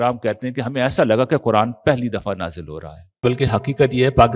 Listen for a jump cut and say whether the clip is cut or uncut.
cut